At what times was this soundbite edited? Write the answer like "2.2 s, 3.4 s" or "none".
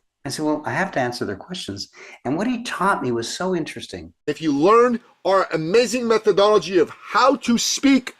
4.3 s